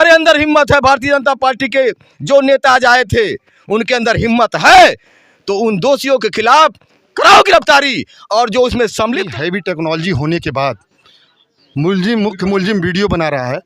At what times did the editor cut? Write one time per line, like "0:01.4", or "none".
0:09.3